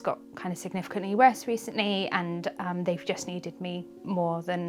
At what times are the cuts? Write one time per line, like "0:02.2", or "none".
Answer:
none